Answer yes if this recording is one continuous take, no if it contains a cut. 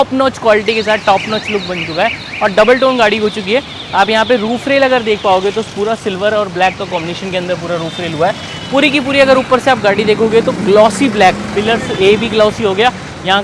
yes